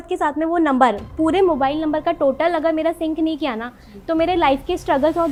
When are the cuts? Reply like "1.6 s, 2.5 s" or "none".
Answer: none